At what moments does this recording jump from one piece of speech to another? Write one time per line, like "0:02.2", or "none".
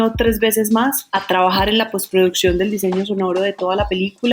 none